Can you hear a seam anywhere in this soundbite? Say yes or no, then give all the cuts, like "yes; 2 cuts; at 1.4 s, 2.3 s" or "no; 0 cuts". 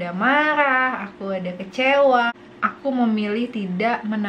yes; 1 cut; at 2.3 s